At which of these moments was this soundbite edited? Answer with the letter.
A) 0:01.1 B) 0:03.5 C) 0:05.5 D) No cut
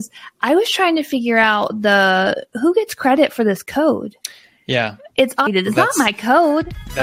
C